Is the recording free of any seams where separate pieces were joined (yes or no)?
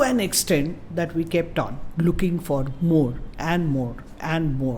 yes